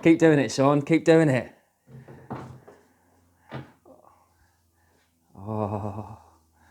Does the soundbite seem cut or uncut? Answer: uncut